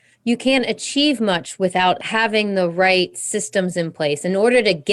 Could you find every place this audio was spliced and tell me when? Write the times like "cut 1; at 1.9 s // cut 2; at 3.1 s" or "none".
cut 1; at 2.0 s